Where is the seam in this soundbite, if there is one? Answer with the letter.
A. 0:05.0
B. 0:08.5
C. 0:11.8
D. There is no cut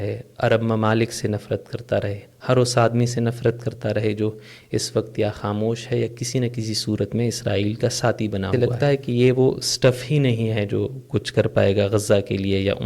B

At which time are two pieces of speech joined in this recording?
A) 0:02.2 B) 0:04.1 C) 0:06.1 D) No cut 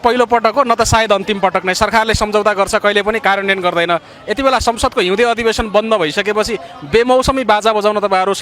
D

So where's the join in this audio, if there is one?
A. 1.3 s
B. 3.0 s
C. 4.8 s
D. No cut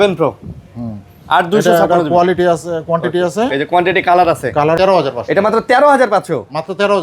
C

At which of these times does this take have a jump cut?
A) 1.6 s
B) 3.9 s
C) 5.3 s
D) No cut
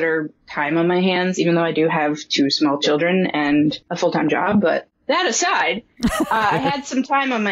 B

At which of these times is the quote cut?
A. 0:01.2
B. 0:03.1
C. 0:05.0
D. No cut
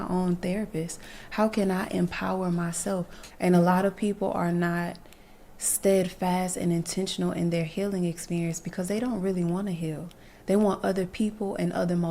B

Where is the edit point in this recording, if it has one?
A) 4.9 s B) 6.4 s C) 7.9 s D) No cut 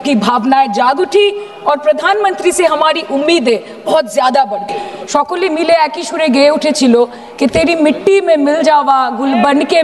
A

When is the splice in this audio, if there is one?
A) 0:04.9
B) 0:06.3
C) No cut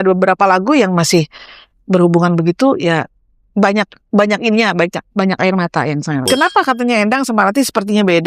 B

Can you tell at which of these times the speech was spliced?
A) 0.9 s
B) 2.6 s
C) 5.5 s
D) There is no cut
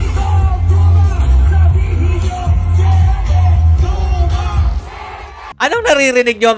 C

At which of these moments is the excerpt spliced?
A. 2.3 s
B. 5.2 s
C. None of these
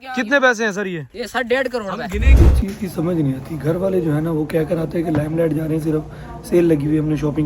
A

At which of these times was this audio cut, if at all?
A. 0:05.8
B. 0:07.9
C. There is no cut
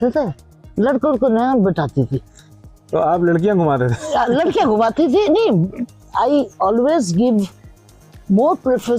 A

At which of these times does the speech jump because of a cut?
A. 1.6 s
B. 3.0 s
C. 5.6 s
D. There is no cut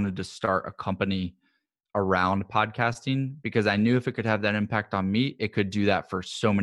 D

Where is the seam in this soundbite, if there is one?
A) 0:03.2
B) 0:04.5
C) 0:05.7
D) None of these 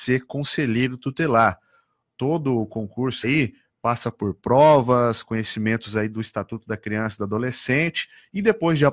A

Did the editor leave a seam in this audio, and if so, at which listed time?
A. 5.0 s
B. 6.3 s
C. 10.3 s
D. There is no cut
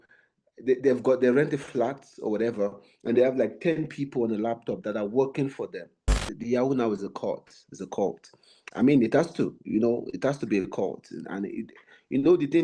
B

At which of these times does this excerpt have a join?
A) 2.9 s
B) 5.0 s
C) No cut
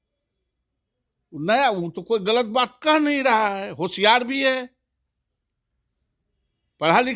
C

